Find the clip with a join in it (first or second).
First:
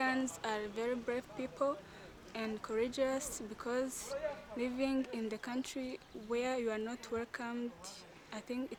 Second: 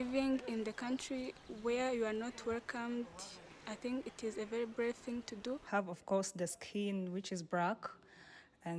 second